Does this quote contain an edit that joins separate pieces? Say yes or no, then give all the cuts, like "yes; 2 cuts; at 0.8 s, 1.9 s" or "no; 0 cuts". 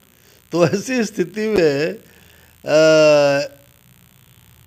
no; 0 cuts